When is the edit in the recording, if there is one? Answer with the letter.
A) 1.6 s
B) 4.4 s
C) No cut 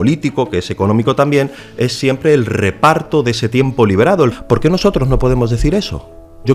B